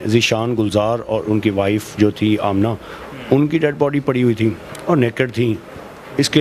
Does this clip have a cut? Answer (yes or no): no